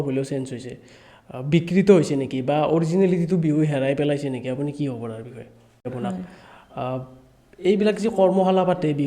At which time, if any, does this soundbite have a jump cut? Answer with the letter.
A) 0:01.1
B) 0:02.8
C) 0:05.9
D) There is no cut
C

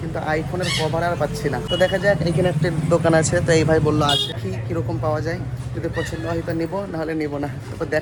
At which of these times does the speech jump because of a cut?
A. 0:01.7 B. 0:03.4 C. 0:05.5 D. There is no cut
D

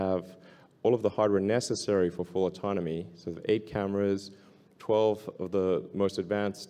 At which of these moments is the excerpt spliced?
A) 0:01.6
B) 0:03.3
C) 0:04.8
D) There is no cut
B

